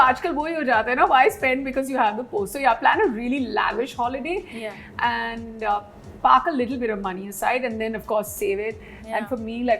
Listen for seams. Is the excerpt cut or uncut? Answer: uncut